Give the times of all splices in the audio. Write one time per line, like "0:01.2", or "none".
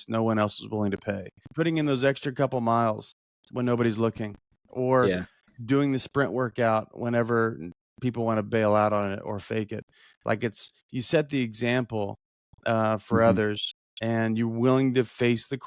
0:01.4